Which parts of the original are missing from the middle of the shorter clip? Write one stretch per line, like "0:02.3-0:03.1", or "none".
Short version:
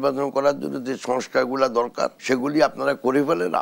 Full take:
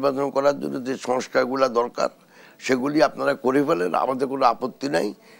0:02.2-0:02.6